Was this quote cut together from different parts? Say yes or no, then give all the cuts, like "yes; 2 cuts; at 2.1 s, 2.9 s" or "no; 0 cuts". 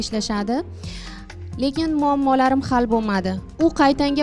no; 0 cuts